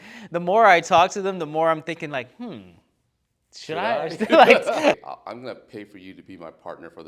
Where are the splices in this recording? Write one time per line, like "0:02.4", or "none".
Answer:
0:05.0